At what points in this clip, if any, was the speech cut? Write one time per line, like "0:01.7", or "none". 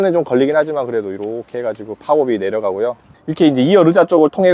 0:03.1